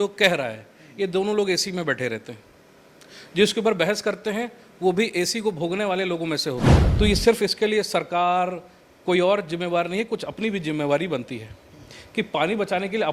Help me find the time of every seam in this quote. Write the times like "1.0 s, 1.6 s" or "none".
6.8 s